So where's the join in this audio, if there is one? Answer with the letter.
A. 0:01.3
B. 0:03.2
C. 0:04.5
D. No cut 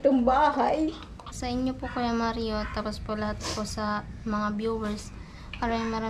A